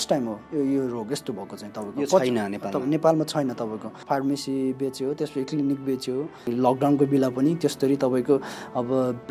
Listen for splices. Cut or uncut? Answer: cut